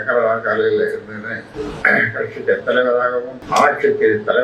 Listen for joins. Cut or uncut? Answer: cut